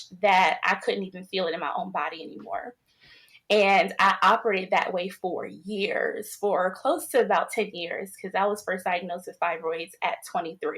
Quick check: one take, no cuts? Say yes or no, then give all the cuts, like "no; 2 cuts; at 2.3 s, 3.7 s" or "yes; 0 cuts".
yes; 0 cuts